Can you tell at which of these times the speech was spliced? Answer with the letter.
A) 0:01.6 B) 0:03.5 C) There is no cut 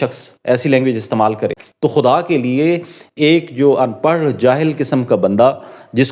A